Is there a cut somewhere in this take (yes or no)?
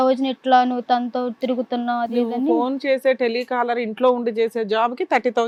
no